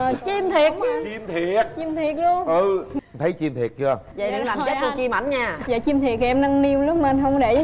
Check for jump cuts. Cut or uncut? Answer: uncut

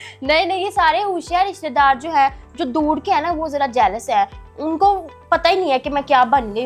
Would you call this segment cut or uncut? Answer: uncut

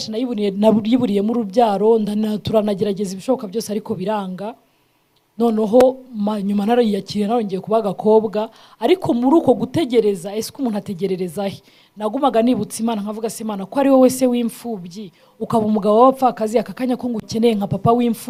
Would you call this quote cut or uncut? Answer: uncut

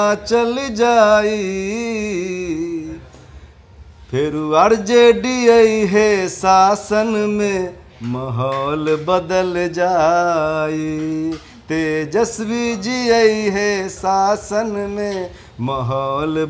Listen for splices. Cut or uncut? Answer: uncut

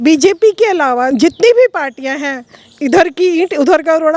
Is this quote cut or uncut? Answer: cut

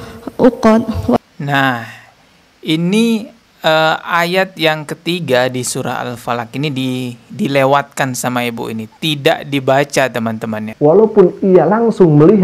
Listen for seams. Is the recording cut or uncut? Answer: cut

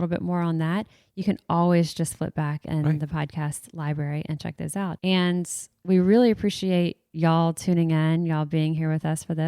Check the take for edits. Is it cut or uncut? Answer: cut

